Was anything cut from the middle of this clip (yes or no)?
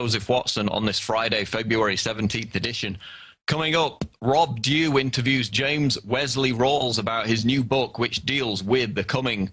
yes